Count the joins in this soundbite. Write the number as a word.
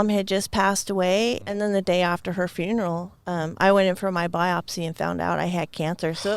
one